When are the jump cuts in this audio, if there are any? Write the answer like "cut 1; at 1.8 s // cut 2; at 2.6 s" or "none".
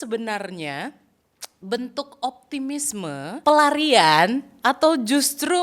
cut 1; at 3.4 s